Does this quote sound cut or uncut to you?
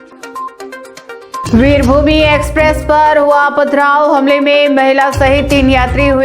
cut